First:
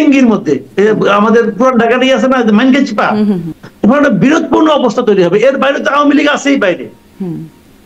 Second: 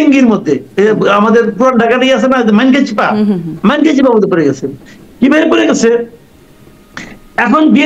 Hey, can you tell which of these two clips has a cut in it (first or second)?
first